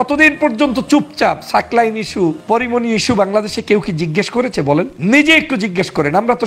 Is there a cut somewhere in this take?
yes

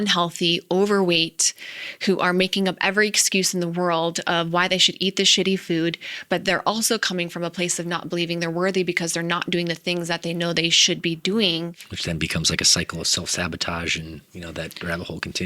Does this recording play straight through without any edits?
no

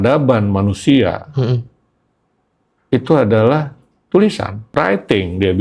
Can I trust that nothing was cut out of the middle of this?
no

